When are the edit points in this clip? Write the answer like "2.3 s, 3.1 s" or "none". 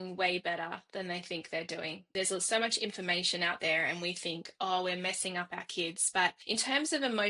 2.0 s, 6.4 s